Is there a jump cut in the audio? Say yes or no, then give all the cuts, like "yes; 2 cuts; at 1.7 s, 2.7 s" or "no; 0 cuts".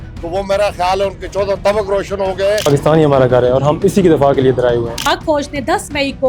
yes; 1 cut; at 5.1 s